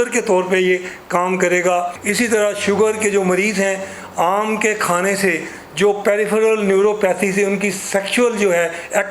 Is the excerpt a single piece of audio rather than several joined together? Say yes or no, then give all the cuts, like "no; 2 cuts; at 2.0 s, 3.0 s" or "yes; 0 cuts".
no; 1 cut; at 2.0 s